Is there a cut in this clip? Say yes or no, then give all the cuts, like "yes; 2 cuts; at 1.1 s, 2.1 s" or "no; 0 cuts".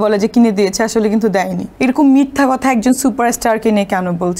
yes; 1 cut; at 1.6 s